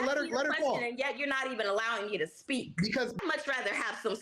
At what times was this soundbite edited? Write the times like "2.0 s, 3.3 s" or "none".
3.2 s

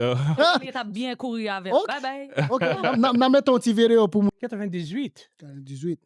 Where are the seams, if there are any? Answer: 4.3 s

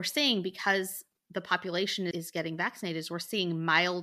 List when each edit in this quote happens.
none

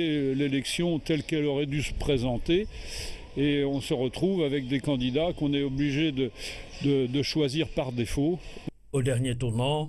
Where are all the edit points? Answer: 6.2 s

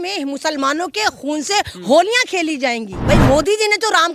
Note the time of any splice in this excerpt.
2.9 s

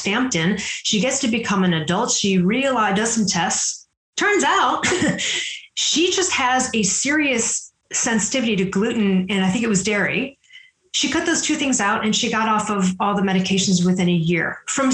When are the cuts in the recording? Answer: none

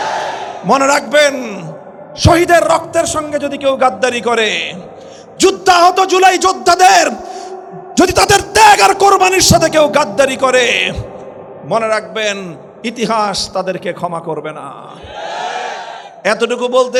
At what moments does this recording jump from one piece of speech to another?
none

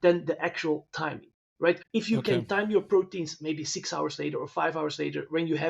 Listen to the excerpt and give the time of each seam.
1.8 s

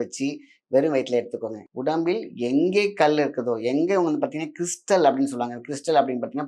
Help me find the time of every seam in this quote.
1.5 s

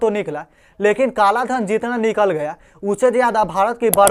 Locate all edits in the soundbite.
none

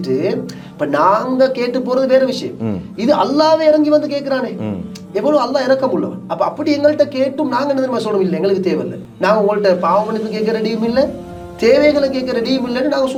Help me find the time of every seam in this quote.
none

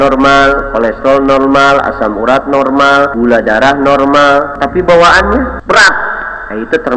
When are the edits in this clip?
3.1 s, 4.6 s, 5.6 s

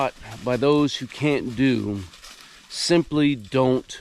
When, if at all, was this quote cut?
none

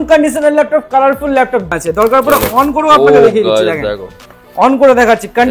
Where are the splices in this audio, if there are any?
1.7 s

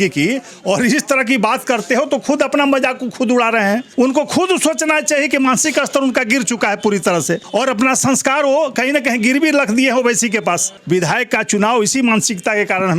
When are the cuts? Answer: 3.9 s, 7.4 s, 10.7 s

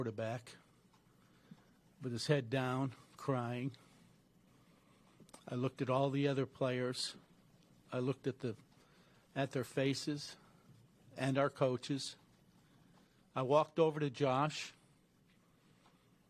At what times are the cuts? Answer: none

